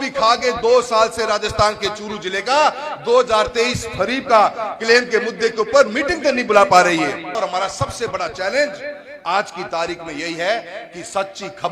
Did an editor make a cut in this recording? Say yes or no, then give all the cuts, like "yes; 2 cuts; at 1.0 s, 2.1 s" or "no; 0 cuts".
yes; 1 cut; at 7.4 s